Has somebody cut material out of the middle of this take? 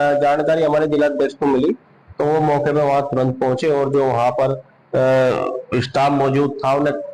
no; 0 cuts

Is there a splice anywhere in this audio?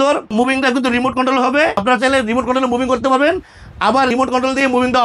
no; 0 cuts

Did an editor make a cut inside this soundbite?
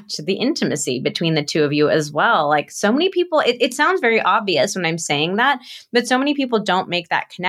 no; 0 cuts

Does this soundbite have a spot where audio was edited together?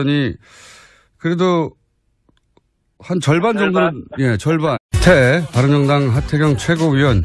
no; 0 cuts

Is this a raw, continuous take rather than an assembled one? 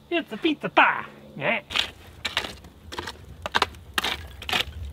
yes; 0 cuts

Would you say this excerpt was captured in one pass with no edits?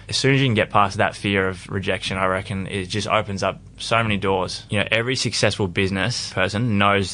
no; 3 cuts; at 0.9 s, 4.6 s, 6.2 s

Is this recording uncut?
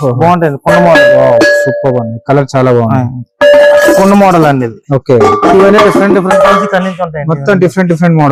yes; 0 cuts

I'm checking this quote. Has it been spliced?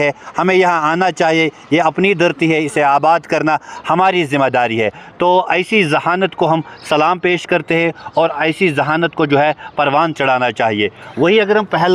no; 0 cuts

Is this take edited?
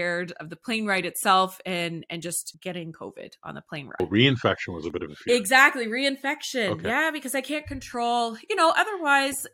yes; 2 cuts; at 2.5 s, 4.0 s

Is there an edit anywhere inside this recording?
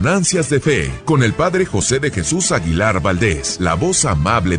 yes; 2 cuts; at 0.9 s, 3.5 s

